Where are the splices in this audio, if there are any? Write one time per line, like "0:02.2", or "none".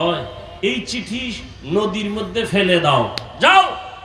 none